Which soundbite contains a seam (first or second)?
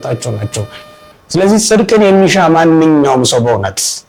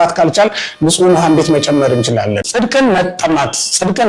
second